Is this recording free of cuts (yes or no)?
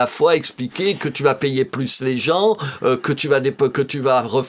yes